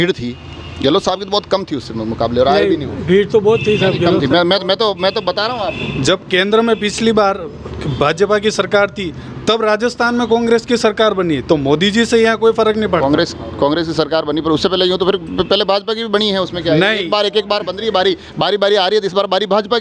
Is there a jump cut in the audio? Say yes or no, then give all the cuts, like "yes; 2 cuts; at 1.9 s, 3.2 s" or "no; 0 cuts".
no; 0 cuts